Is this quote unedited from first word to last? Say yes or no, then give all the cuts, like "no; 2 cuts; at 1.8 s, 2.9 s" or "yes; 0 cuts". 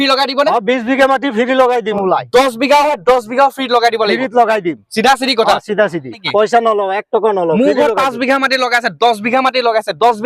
no; 2 cuts; at 1.9 s, 6.2 s